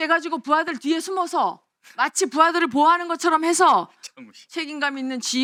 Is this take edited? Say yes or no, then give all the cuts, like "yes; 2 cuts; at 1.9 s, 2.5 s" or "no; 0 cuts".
no; 0 cuts